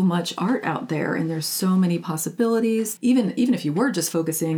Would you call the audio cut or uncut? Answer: cut